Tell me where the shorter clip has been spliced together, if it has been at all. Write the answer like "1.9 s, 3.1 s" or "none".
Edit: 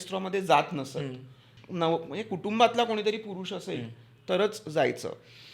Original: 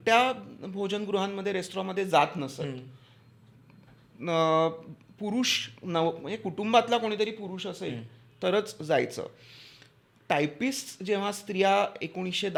1.5 s